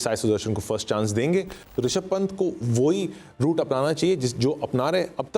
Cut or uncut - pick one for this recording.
cut